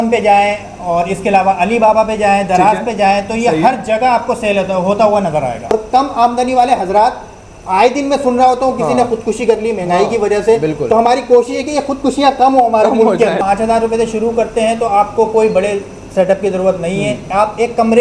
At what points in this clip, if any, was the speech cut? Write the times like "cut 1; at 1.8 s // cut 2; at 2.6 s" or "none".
cut 1; at 5.7 s // cut 2; at 13.4 s